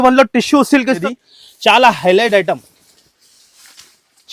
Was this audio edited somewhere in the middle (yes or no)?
yes